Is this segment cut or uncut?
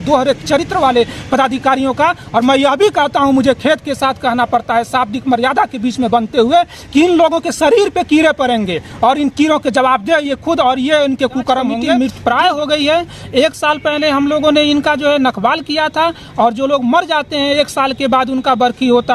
cut